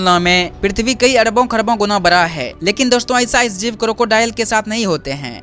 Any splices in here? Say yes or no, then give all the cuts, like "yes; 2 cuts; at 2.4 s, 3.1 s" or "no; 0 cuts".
yes; 1 cut; at 2.5 s